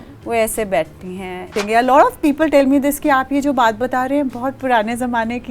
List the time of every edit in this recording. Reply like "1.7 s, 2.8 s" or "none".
1.6 s